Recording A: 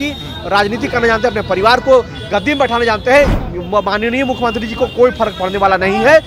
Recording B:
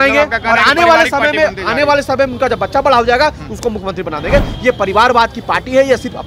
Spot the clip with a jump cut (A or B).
A